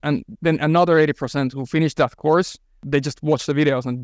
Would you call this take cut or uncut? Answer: cut